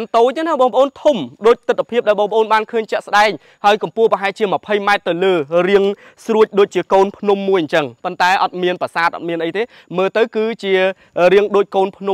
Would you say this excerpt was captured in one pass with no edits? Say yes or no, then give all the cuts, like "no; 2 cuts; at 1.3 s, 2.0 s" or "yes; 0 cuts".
yes; 0 cuts